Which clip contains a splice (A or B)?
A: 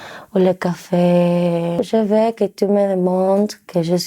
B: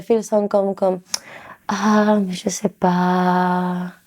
A